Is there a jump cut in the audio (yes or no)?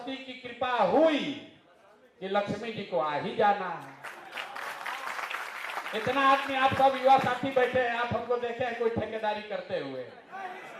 no